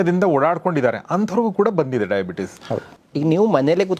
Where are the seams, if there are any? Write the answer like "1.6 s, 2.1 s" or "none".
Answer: 2.9 s